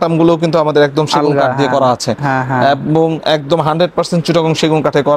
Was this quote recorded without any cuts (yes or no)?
yes